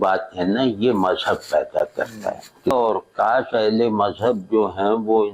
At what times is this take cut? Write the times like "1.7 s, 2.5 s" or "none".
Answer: 2.7 s

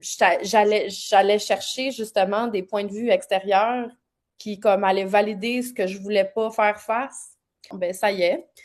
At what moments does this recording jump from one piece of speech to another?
7.7 s

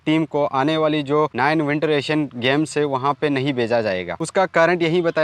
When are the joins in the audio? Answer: none

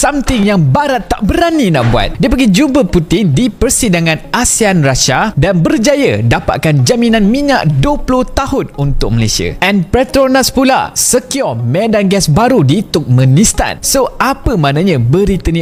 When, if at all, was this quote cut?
none

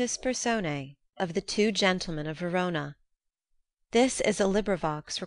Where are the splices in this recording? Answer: 1.0 s

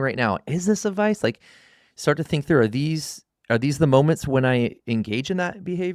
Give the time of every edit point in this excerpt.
none

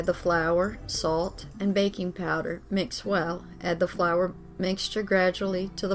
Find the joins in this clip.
none

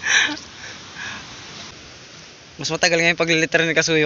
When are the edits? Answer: 1.7 s

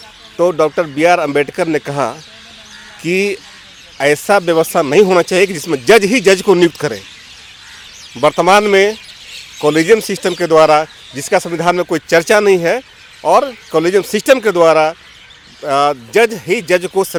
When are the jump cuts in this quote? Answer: none

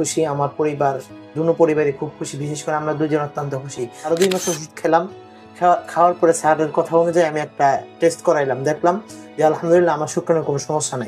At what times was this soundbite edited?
4.1 s

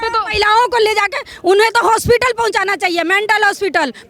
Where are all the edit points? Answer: none

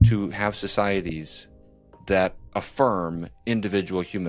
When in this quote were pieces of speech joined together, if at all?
2.4 s

